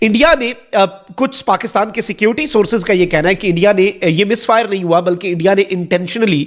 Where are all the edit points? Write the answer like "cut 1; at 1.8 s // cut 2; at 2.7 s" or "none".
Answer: none